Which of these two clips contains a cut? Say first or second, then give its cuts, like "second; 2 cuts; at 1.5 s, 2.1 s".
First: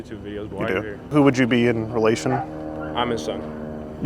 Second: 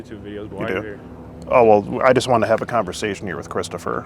first; 1 cut; at 1.1 s